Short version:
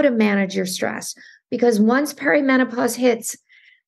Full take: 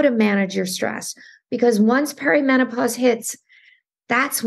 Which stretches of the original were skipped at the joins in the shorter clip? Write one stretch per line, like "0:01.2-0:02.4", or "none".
none